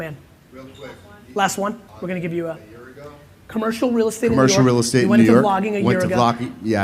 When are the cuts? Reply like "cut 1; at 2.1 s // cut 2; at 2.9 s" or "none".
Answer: cut 1; at 1.9 s